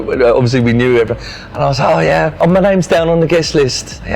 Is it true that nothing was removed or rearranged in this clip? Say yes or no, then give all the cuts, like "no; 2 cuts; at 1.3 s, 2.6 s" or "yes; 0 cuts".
no; 1 cut; at 2.4 s